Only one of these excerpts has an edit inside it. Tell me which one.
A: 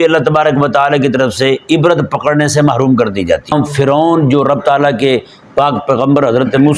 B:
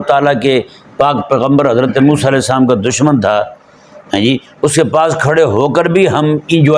A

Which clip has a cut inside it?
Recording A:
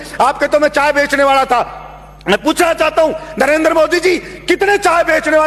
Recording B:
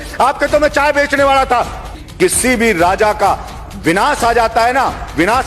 B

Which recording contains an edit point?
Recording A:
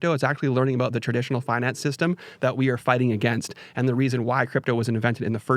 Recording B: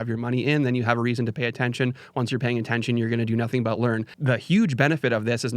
B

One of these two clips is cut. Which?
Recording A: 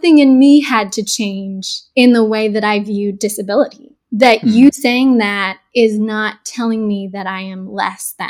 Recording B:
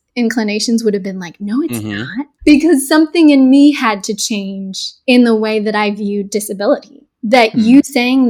B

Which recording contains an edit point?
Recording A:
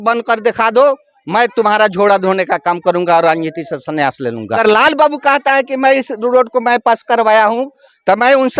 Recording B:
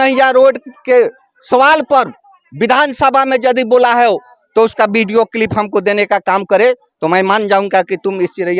A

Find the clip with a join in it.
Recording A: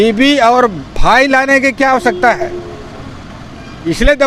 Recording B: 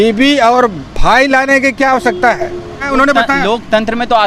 B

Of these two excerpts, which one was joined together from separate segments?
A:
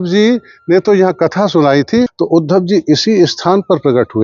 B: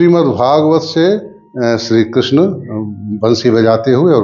A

